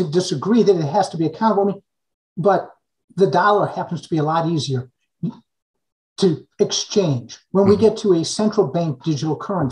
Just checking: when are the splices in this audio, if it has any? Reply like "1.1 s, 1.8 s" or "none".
none